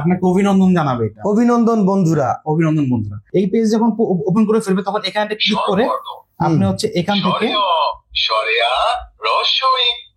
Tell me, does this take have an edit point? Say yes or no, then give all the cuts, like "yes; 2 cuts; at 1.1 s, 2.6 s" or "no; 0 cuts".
yes; 1 cut; at 3.1 s